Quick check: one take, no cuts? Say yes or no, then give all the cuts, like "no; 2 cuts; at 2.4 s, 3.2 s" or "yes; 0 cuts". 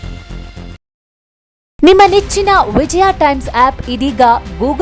yes; 0 cuts